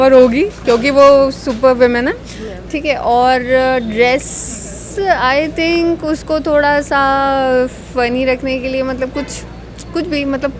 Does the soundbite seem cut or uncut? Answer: uncut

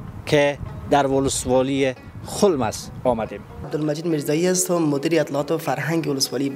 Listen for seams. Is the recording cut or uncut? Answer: cut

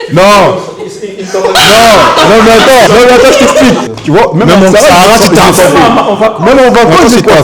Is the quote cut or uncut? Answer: cut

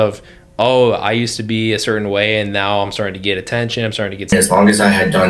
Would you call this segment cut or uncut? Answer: cut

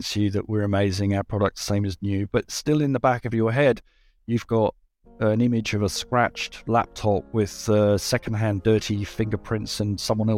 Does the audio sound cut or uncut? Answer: uncut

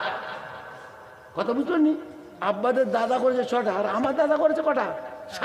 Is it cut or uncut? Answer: uncut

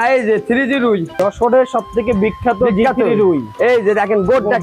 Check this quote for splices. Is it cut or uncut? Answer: cut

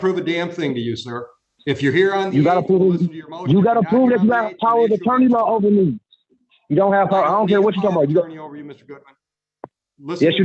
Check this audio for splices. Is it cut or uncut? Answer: uncut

